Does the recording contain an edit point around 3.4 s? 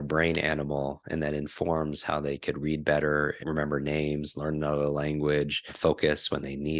yes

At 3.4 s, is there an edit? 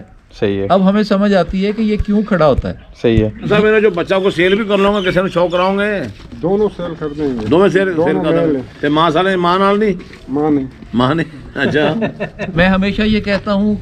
yes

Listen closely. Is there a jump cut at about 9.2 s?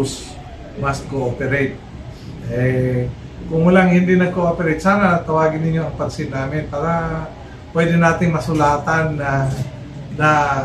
no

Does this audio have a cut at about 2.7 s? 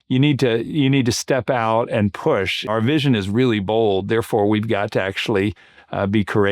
yes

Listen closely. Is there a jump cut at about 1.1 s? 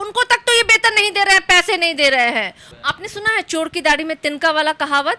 no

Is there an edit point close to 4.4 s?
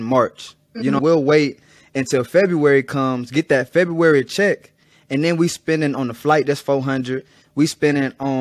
no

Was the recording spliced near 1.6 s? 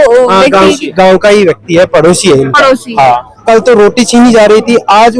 no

